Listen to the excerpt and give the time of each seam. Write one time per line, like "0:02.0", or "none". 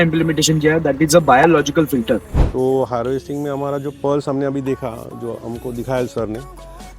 0:02.4